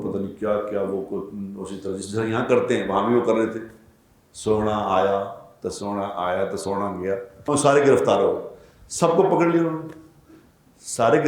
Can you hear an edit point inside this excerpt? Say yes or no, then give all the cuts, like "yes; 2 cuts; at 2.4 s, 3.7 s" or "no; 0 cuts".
yes; 1 cut; at 7.3 s